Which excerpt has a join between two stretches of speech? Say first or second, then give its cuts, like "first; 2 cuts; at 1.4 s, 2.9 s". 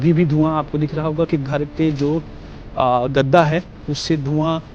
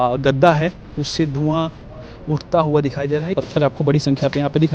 second; 1 cut; at 3.3 s